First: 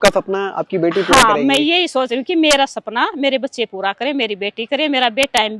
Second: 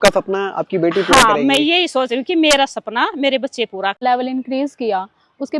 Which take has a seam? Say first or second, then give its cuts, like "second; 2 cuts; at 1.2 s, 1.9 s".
second; 1 cut; at 4.0 s